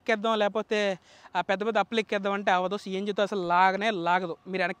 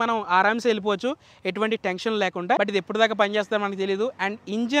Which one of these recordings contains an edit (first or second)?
second